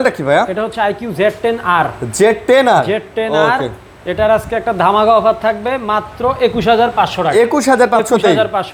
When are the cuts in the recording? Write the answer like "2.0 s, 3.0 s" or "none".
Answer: none